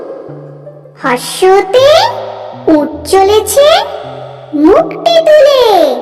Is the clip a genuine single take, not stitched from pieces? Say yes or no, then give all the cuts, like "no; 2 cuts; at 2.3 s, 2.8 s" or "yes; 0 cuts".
yes; 0 cuts